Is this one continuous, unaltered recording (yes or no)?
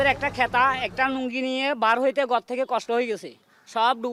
yes